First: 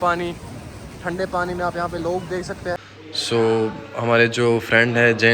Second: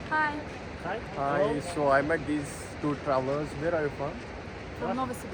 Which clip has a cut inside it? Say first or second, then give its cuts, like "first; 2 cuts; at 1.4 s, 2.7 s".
first; 1 cut; at 2.8 s